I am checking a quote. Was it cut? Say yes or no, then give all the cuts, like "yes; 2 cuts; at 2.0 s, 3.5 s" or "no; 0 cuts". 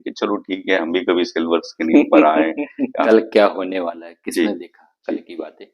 yes; 1 cut; at 3.1 s